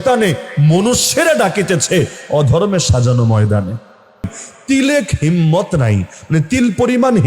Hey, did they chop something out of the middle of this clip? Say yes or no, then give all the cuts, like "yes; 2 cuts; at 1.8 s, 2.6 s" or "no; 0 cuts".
yes; 1 cut; at 4.5 s